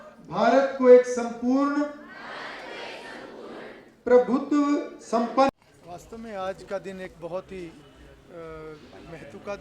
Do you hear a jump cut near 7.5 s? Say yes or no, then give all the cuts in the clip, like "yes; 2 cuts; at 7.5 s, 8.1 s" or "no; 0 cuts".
no; 1 cut; at 5.5 s